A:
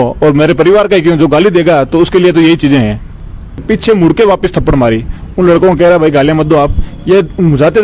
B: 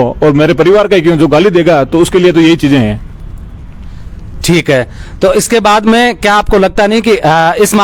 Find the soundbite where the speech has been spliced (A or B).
A